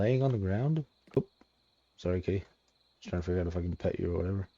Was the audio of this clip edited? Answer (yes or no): yes